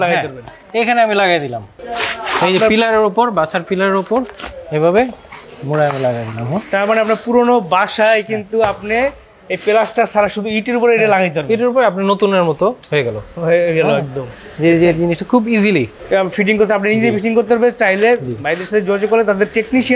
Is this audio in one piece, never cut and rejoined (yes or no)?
yes